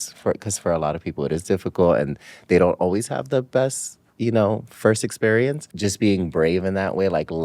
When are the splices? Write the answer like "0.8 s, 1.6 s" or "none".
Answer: 5.7 s